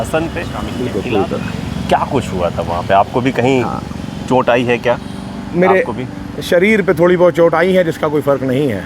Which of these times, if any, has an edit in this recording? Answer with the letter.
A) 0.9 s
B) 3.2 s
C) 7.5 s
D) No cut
A